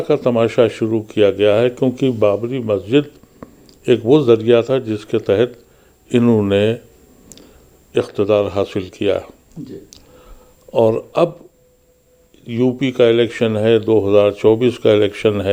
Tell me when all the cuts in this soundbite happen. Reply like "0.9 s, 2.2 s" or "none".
none